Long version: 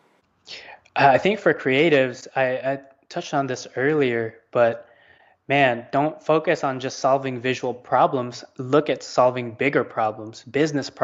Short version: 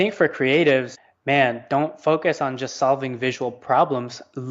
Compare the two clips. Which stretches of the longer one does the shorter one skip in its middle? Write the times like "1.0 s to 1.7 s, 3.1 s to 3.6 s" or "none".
2.2 s to 5.2 s